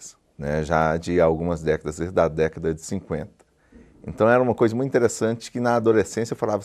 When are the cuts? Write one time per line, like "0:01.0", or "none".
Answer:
none